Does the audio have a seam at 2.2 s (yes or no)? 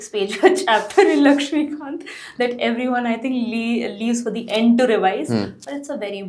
no